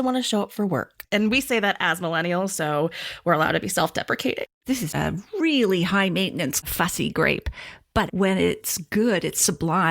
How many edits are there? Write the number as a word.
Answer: four